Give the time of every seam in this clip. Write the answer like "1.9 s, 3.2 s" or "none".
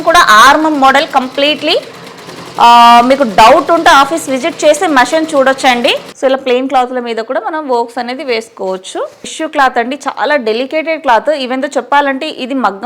6.1 s, 9.3 s